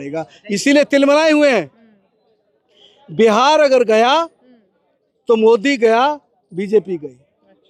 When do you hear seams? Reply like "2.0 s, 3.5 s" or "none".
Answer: none